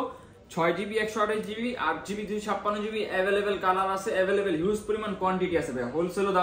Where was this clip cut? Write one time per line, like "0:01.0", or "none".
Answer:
none